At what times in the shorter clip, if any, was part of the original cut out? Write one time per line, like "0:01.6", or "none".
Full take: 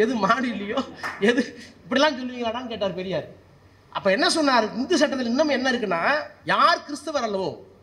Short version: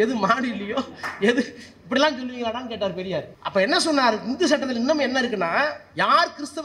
0:03.4

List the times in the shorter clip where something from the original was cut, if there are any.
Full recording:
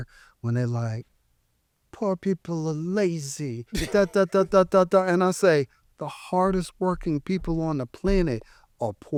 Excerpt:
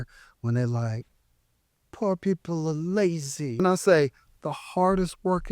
0:03.6

